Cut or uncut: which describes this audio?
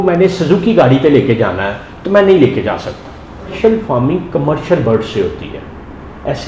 cut